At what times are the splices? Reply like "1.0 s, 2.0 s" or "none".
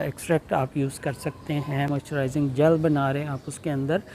1.9 s